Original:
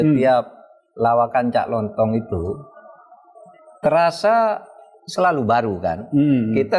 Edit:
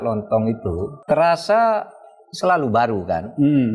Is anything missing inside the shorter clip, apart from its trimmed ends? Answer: yes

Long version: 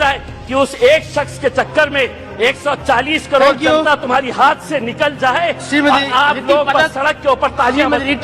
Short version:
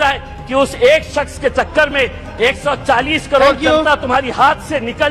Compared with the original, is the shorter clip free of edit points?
yes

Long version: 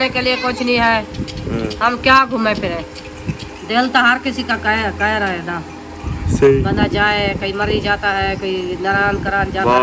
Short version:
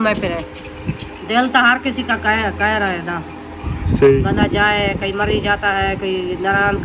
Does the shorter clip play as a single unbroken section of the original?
yes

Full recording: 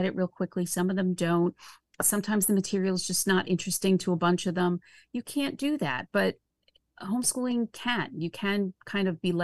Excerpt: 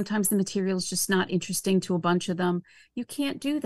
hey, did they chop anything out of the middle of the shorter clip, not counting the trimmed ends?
no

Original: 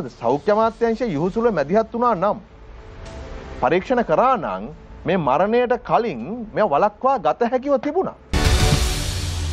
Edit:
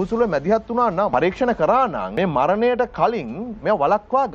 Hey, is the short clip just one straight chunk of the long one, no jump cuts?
no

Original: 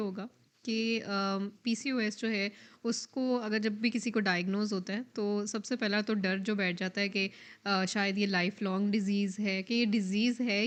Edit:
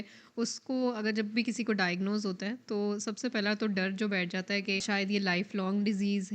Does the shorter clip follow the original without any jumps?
no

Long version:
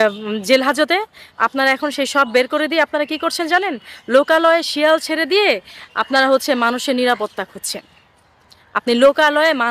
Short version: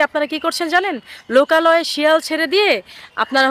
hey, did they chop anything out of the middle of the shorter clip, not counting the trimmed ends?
no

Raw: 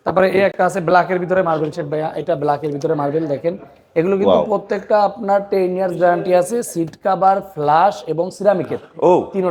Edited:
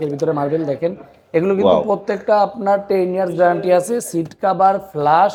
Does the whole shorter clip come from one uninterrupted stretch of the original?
yes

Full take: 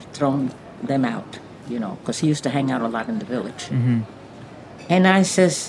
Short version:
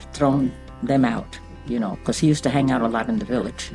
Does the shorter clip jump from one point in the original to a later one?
no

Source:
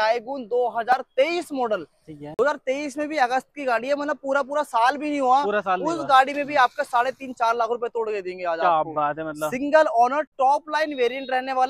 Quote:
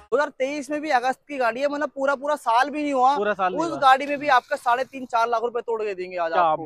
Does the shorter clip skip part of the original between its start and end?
no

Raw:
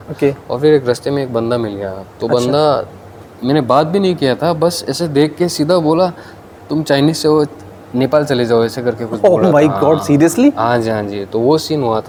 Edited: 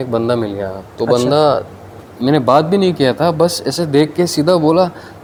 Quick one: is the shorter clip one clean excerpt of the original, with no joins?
yes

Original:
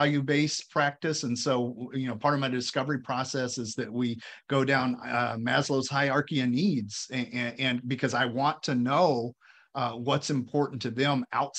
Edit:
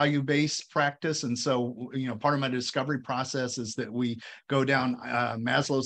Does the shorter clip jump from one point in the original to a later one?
no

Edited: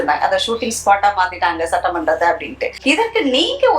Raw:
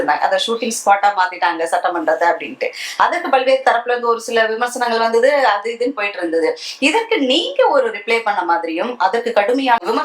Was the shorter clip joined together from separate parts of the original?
yes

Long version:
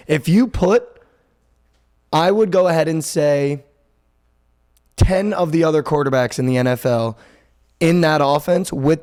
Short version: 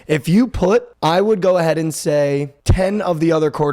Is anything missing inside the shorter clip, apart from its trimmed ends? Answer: yes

